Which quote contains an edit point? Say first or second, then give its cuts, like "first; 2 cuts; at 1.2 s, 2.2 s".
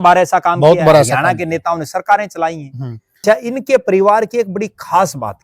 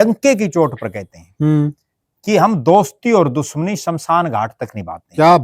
first; 1 cut; at 3.2 s